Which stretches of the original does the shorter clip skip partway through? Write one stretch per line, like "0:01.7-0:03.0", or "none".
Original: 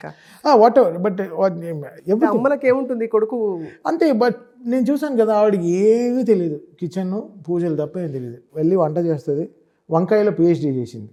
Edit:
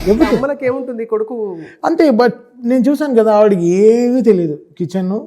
none